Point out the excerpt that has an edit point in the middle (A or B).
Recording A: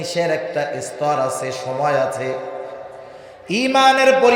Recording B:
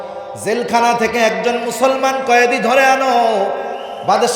A